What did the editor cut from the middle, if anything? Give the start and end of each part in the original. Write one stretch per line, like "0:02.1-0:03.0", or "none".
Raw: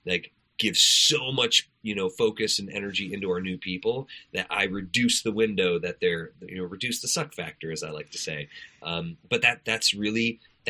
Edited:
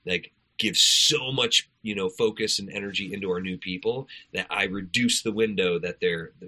none